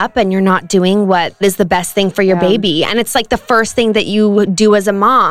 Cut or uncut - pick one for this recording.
cut